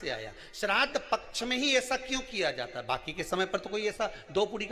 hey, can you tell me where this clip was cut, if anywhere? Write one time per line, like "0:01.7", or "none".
none